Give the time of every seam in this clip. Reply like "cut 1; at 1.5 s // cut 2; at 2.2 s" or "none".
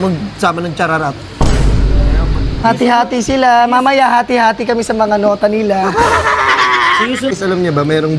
cut 1; at 2.5 s // cut 2; at 7.4 s